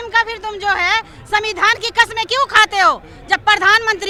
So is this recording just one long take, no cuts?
yes; 0 cuts

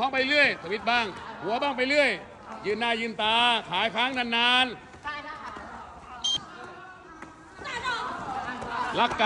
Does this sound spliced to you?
yes; 1 cut; at 6.4 s

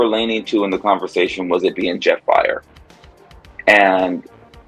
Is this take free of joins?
yes; 0 cuts

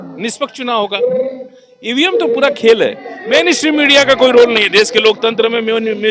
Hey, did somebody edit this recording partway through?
yes; 1 cut; at 3.1 s

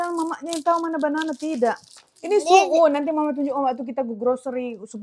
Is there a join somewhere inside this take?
no; 0 cuts

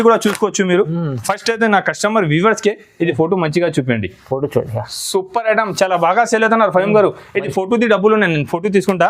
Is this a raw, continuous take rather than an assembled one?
yes; 0 cuts

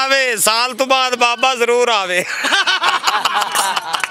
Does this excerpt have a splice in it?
no; 0 cuts

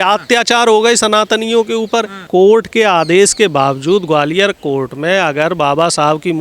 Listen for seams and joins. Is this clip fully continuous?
no; 1 cut; at 2.2 s

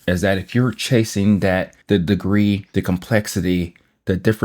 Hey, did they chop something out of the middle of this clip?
yes; 2 cuts; at 1.7 s, 2.7 s

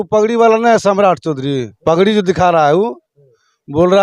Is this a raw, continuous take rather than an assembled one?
no; 1 cut; at 1.7 s

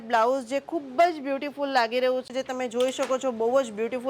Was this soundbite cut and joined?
yes; 1 cut; at 2.3 s

